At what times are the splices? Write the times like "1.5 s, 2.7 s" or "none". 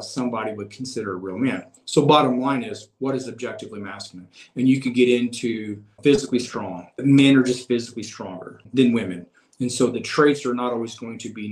5.9 s, 6.9 s, 8.7 s